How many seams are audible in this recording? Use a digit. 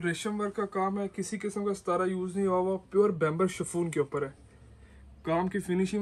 0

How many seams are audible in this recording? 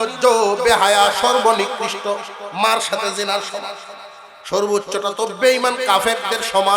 0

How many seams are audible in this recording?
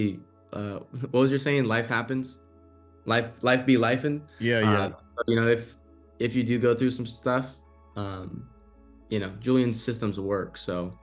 0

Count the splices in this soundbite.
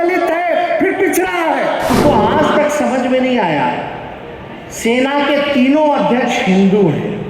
1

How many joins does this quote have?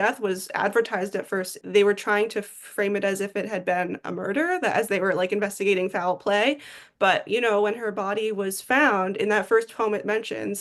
1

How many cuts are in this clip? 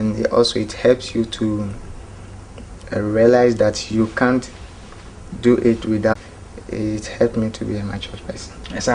1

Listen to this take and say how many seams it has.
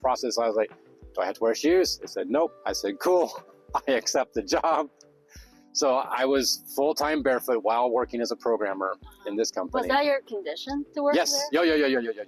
0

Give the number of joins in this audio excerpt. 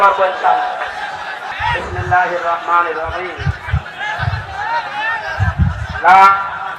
1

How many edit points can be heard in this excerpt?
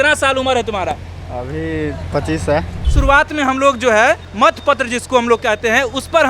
2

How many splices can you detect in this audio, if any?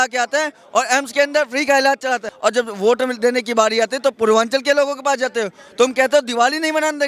1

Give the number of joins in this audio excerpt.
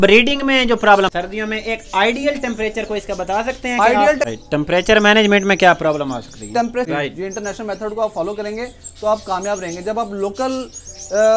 3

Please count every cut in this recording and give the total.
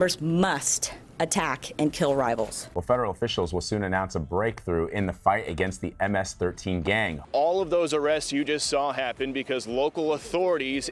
2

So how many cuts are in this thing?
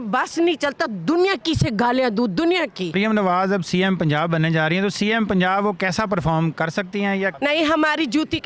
2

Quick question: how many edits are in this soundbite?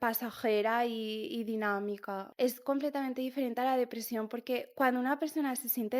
1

